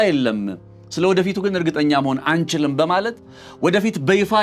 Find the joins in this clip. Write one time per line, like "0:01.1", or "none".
none